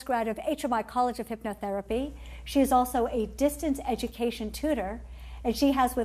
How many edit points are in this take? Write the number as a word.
one